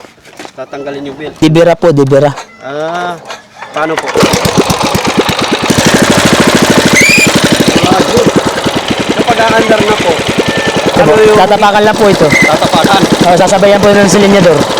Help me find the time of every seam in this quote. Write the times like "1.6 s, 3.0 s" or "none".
1.4 s, 5.7 s, 8.8 s